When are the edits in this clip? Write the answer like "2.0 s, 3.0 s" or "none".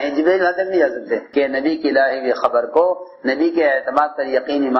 1.3 s